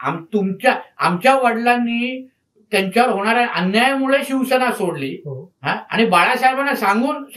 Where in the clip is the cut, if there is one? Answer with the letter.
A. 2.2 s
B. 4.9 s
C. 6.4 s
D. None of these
D